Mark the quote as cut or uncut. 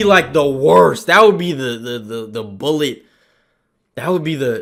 uncut